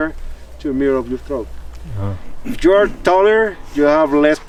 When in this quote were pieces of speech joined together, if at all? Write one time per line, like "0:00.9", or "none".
none